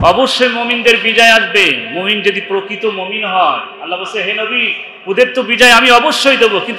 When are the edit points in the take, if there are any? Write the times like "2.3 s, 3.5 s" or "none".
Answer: none